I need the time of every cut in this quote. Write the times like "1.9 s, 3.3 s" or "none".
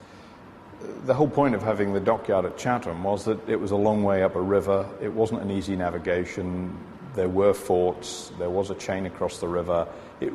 0.9 s